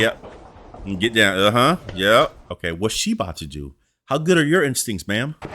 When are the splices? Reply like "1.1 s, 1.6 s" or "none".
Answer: 2.5 s